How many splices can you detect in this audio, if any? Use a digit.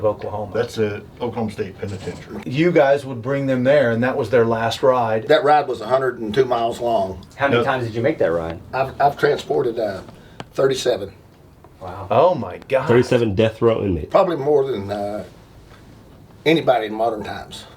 4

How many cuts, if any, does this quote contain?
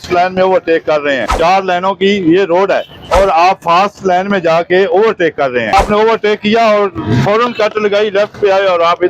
3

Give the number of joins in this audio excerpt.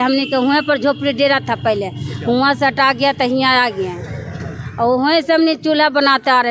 0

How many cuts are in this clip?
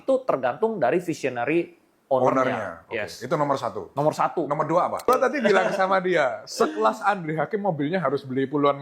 1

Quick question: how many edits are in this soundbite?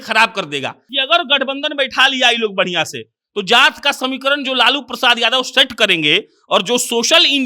1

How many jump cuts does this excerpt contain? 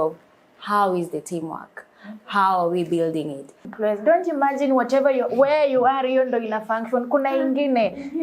1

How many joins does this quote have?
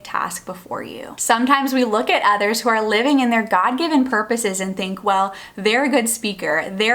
1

